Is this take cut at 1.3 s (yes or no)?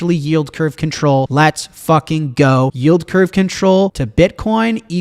yes